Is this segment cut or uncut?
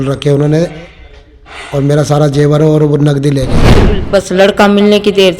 cut